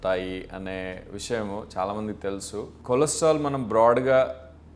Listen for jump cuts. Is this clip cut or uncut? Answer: cut